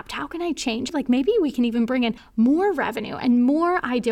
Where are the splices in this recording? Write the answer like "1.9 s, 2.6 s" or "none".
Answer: 0.9 s, 2.2 s